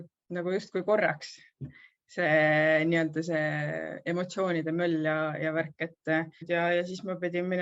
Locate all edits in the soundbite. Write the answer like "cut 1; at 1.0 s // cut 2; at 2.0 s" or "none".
cut 1; at 6.4 s